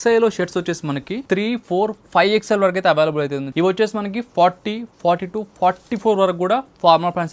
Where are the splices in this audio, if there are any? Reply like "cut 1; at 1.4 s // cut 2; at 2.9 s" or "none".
cut 1; at 1.1 s // cut 2; at 3.5 s